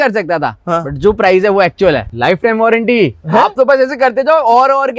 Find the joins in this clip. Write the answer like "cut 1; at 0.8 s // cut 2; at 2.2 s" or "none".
cut 1; at 2.1 s